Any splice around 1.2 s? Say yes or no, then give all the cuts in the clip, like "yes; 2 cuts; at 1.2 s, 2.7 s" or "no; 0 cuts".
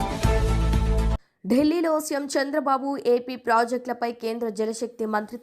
yes; 1 cut; at 1.2 s